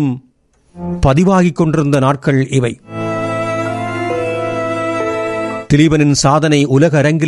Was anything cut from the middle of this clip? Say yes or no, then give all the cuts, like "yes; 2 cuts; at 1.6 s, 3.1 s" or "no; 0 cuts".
no; 0 cuts